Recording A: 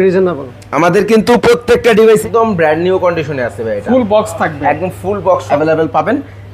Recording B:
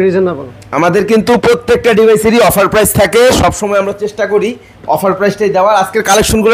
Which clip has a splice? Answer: A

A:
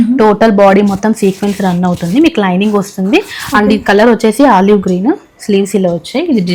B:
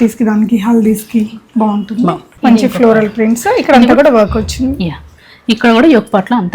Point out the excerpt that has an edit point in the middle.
B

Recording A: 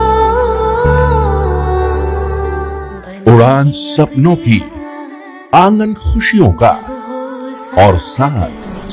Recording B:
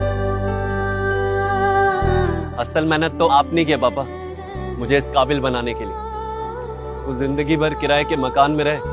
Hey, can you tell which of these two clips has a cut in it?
B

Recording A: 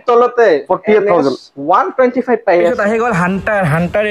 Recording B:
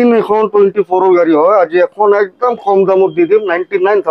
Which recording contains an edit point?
A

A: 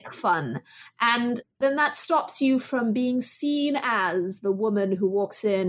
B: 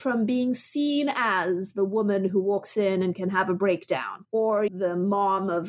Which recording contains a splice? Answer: B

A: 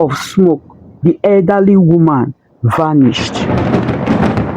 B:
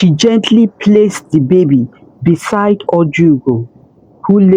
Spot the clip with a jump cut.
A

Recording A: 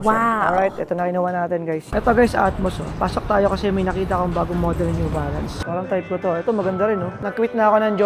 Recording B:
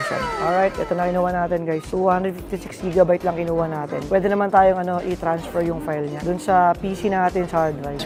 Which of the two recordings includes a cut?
A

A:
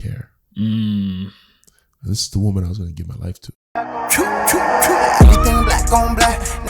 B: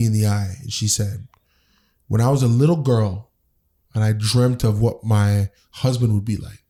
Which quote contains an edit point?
A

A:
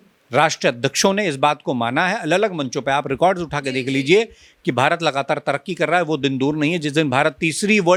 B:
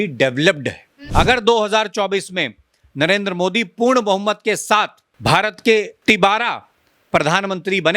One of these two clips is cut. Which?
B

